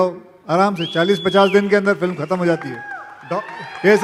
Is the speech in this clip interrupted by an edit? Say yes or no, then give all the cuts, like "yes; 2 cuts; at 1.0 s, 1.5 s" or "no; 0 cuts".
no; 0 cuts